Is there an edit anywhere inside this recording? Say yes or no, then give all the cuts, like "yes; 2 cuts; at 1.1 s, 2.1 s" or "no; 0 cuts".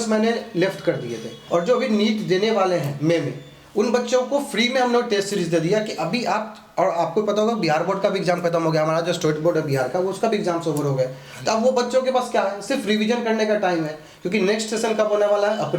yes; 1 cut; at 1.4 s